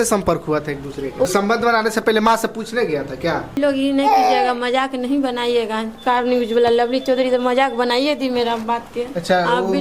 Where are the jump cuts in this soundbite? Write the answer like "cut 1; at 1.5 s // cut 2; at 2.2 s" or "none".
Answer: cut 1; at 1.3 s // cut 2; at 3.5 s